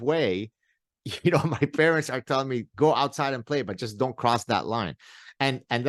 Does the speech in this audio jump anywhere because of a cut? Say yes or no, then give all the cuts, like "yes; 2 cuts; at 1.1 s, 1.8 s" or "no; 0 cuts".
no; 0 cuts